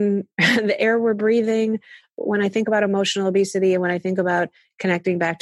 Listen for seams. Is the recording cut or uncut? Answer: cut